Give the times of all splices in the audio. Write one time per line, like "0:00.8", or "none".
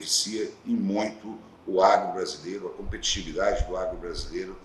none